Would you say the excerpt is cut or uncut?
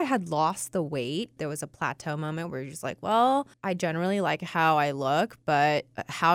cut